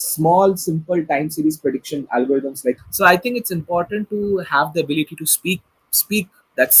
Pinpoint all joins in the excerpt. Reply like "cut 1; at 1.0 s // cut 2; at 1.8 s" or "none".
cut 1; at 2.8 s